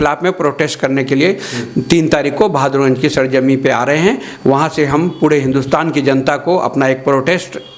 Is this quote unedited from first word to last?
yes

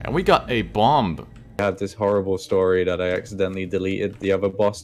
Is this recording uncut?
no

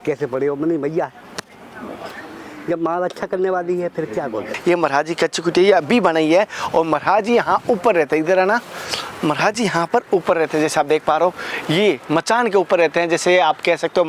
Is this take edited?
yes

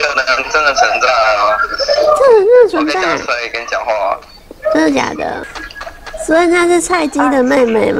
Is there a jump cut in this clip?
yes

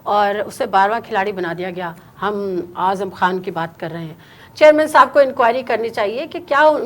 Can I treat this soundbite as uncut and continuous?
no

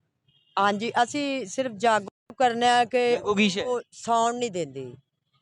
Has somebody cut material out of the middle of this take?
yes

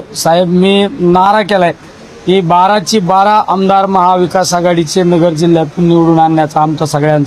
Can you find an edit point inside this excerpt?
no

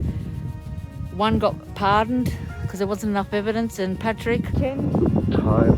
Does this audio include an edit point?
yes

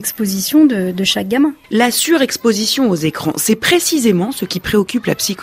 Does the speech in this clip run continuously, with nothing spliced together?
no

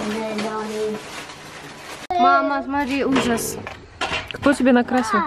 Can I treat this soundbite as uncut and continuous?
no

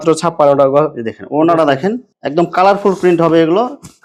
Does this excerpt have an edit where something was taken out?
no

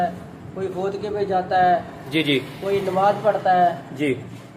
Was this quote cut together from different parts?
no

